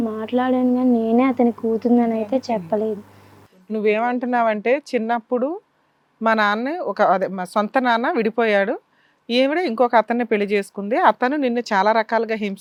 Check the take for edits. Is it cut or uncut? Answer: uncut